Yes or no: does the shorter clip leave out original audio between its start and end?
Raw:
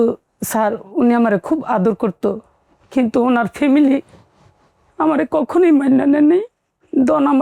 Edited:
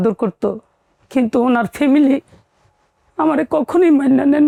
no